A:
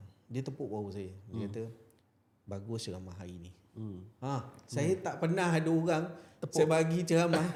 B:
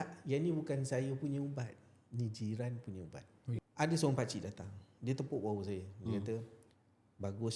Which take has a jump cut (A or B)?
B